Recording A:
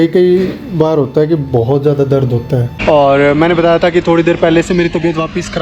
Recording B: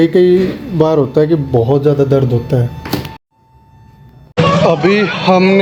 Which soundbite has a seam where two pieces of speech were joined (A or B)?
A